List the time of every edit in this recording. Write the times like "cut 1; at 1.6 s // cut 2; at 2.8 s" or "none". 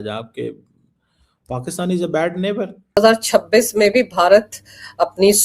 cut 1; at 3.0 s